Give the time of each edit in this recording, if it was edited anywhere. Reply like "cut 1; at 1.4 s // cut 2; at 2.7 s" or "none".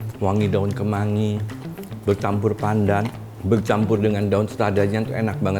cut 1; at 3.3 s